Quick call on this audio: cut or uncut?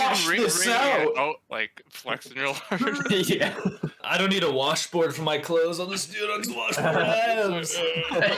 cut